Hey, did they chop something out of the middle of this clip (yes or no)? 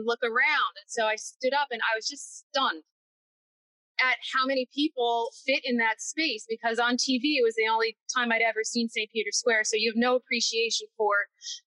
no